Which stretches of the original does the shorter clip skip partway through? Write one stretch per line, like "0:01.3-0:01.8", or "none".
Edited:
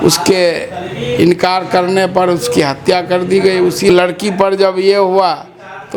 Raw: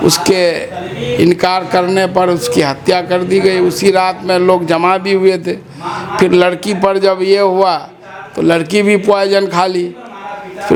0:03.9-0:06.3